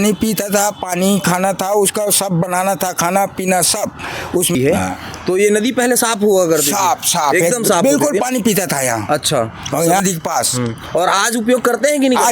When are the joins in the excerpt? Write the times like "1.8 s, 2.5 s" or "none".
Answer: 4.5 s, 10.0 s